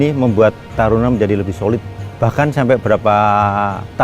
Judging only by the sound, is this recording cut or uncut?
cut